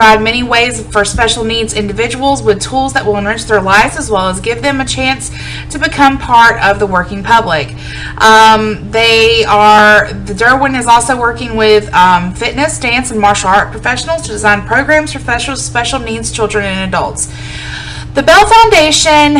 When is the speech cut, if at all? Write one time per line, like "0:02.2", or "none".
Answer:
0:11.3